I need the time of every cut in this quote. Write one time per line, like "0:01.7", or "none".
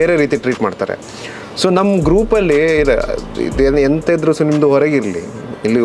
none